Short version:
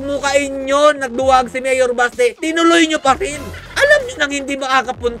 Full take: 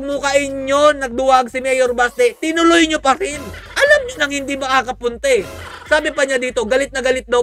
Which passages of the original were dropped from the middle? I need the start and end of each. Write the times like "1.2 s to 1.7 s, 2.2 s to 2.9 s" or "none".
none